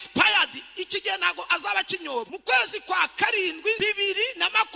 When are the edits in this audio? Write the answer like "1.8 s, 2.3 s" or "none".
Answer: 2.3 s, 3.8 s